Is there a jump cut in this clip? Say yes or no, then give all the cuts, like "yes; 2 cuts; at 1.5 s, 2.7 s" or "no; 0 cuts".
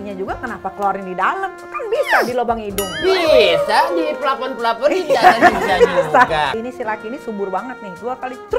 yes; 1 cut; at 6.5 s